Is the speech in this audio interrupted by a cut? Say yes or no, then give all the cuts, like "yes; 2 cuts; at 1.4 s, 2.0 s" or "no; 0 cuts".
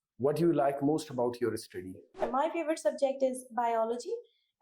yes; 1 cut; at 2.2 s